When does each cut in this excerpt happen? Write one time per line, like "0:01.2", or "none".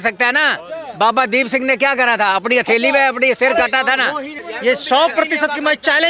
0:04.4